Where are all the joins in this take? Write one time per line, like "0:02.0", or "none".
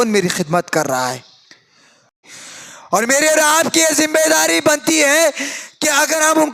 0:02.2